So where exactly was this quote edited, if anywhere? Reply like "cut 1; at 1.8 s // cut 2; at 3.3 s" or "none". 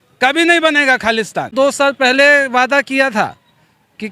cut 1; at 1.5 s